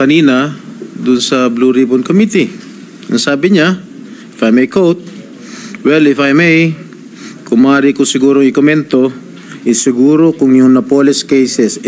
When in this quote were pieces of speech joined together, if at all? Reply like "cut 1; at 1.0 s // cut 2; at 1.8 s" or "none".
none